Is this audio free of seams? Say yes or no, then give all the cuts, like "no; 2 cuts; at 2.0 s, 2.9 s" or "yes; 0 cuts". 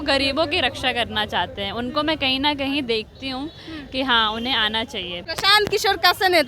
no; 1 cut; at 5.2 s